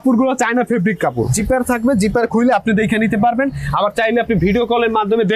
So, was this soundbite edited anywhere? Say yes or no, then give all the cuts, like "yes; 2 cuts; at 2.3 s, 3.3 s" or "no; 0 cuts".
yes; 1 cut; at 1.3 s